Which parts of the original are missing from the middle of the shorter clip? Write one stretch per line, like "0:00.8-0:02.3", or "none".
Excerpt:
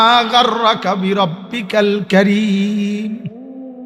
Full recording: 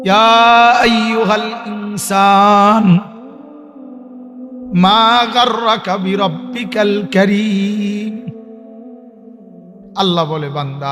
none